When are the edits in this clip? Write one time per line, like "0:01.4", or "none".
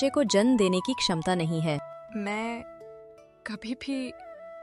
0:01.9